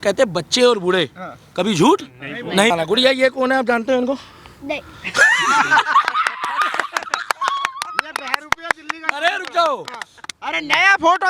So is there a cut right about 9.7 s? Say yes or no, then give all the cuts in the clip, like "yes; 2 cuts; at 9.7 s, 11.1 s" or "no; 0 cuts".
no; 1 cut; at 2.7 s